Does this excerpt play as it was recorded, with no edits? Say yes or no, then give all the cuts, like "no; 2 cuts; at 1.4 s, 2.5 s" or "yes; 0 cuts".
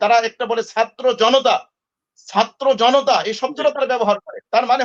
yes; 0 cuts